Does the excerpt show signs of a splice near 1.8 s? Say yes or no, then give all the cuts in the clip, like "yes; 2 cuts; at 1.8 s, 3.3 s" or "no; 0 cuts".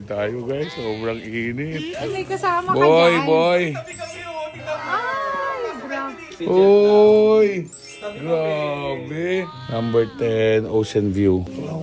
yes; 2 cuts; at 1.8 s, 9.6 s